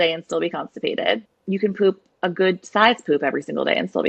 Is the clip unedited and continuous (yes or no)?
no